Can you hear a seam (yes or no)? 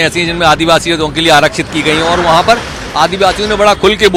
no